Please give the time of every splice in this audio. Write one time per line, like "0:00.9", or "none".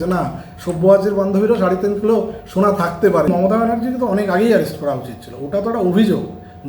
0:03.3

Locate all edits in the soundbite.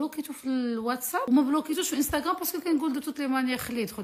0:01.3

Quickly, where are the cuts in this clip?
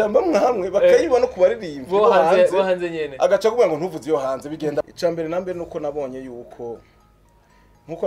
0:04.9

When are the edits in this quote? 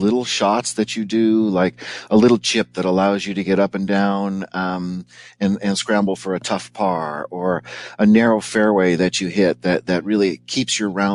none

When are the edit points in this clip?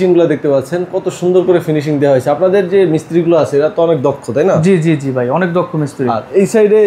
none

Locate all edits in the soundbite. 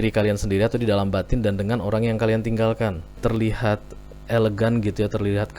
0:03.2

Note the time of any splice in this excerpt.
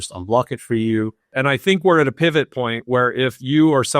0:01.3

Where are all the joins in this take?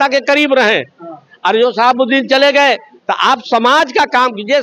none

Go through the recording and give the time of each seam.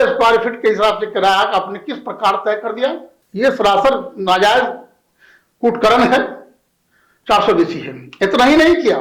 0:03.1

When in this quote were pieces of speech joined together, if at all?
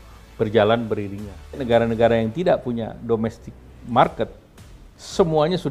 0:01.6

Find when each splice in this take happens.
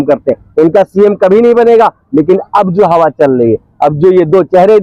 none

